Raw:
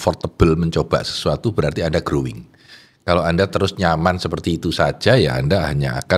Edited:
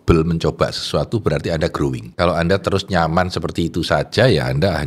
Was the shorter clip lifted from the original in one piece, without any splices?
no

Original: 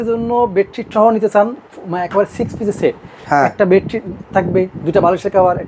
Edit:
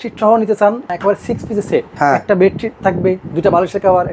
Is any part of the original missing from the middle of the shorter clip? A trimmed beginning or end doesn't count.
yes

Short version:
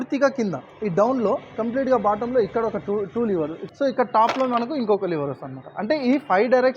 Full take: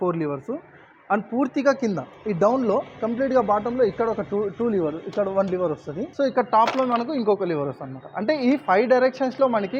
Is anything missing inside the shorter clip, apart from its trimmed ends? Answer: yes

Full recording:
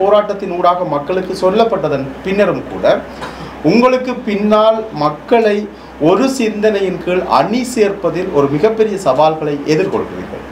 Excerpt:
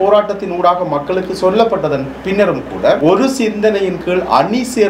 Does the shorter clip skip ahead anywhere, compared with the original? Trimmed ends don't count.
yes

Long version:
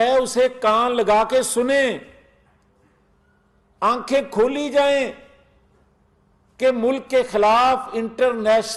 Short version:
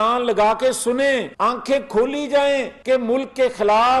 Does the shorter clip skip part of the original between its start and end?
yes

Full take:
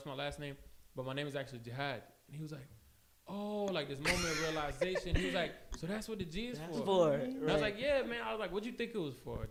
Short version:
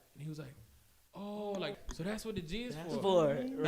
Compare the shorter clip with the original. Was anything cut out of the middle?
yes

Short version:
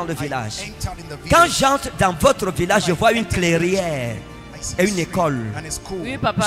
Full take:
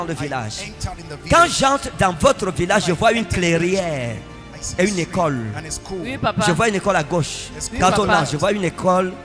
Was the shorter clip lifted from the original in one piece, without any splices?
yes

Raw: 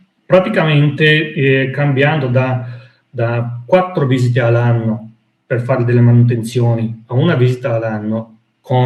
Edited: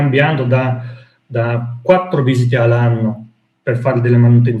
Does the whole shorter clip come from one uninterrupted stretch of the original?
yes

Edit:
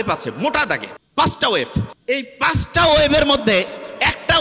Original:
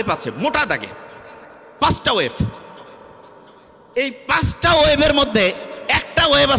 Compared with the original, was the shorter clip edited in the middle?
yes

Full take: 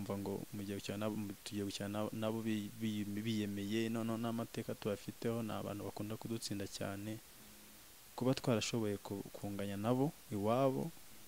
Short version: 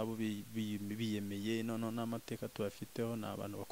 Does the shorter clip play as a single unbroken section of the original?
yes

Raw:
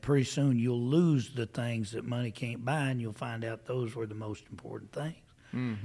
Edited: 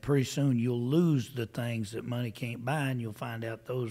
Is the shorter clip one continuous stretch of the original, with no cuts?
yes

